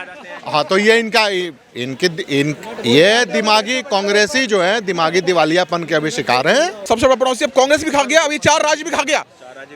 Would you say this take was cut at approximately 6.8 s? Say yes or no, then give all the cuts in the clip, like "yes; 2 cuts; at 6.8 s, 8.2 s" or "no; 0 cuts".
yes; 1 cut; at 6.8 s